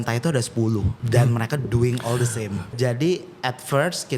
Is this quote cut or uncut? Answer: cut